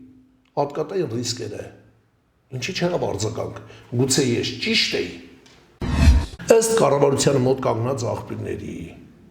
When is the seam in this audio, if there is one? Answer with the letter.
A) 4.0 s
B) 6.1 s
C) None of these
B